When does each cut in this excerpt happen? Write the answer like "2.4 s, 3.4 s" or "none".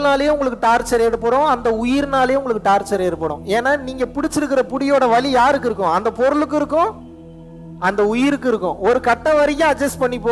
none